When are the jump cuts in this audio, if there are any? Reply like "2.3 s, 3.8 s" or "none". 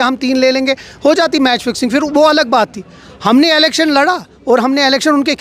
none